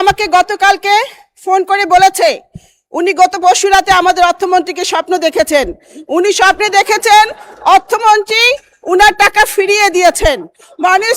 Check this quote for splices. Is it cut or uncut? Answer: uncut